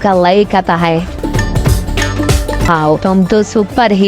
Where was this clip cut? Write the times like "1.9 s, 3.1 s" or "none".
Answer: 1.1 s, 2.7 s